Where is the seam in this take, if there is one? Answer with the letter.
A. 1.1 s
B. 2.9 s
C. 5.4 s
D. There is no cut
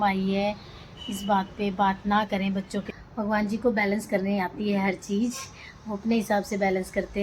B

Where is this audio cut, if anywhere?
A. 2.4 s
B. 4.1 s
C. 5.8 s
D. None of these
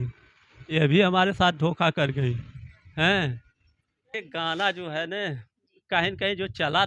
B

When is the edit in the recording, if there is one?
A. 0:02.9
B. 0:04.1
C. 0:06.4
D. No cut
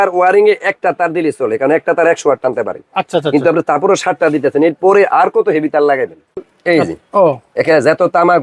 C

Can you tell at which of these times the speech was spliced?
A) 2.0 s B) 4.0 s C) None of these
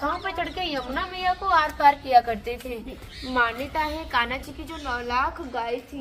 C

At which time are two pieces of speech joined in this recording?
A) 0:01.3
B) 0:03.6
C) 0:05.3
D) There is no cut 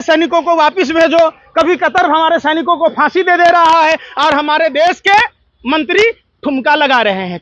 D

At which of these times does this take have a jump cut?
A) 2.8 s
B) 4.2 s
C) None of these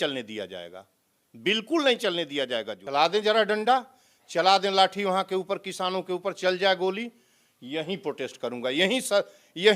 A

